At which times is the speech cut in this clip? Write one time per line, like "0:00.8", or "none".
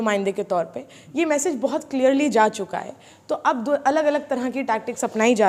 none